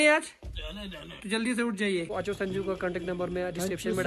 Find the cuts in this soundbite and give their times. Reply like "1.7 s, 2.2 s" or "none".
2.2 s